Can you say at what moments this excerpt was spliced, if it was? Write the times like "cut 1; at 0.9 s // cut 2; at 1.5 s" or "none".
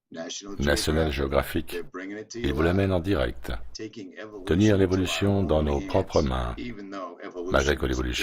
cut 1; at 5.8 s